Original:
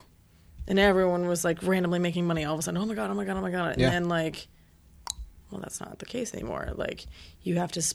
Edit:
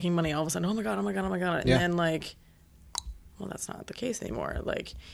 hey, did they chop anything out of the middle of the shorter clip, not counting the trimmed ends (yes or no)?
no